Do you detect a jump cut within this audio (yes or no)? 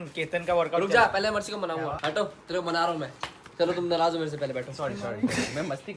yes